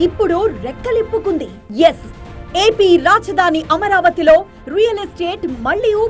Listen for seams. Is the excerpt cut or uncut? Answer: cut